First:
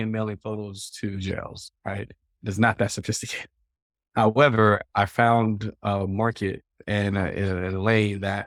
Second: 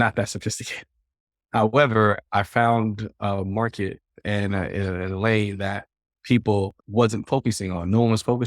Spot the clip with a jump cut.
second; 1 cut; at 6.8 s

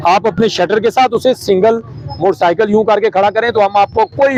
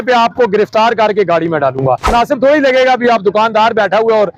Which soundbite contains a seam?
second; 1 cut; at 2.1 s

